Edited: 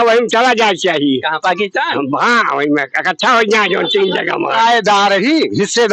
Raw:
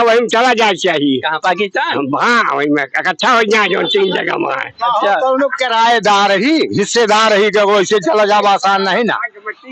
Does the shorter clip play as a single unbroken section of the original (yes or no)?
no